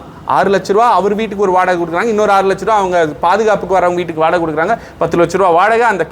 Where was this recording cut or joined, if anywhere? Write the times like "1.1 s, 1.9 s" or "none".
none